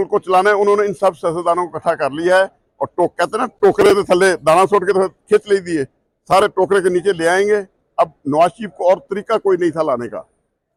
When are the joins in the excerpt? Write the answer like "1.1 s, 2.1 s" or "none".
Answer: none